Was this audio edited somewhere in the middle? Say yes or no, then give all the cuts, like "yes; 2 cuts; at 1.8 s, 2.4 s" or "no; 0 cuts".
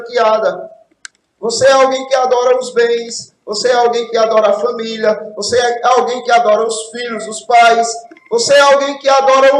no; 0 cuts